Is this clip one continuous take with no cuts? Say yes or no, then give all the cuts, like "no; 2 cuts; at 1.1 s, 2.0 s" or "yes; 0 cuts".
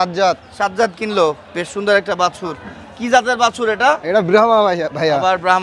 yes; 0 cuts